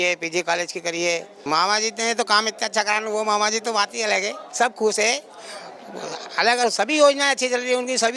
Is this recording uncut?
no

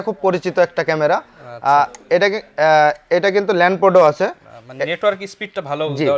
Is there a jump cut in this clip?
no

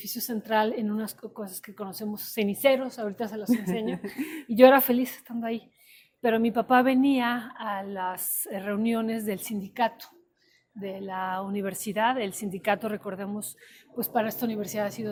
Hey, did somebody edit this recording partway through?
no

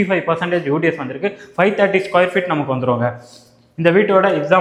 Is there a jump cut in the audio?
no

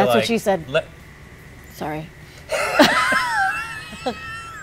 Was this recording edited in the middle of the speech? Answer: no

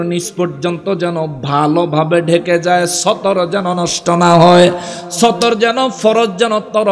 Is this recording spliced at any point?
no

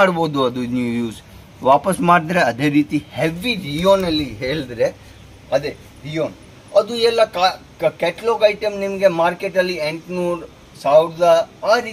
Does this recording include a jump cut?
no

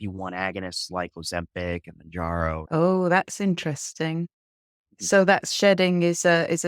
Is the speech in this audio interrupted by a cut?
yes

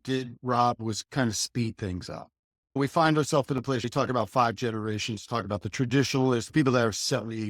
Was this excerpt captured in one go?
no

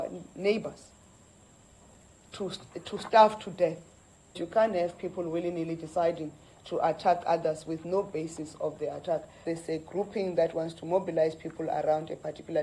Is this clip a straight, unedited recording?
no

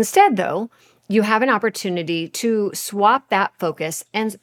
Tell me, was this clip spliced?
no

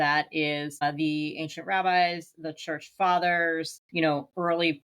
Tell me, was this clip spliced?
yes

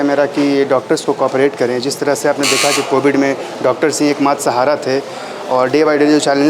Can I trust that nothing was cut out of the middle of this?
yes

